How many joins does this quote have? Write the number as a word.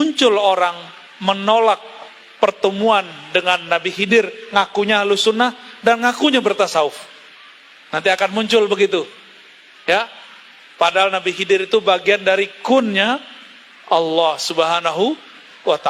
zero